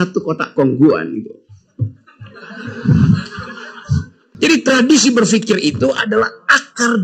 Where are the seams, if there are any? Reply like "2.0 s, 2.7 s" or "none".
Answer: 4.2 s